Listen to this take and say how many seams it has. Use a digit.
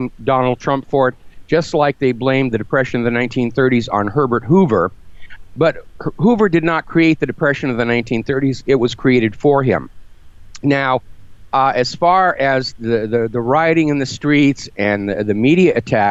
0